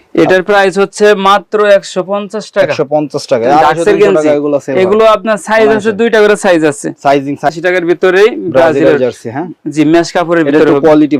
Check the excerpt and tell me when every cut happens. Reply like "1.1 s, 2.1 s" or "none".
7.5 s